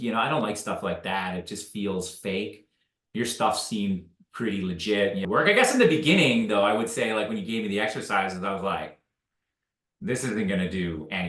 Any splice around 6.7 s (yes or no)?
no